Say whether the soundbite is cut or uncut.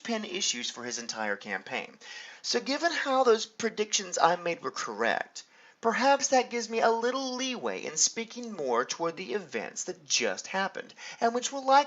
uncut